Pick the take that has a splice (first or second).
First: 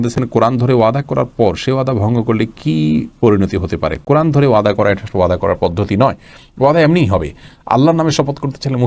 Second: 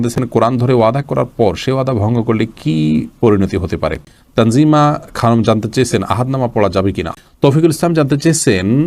second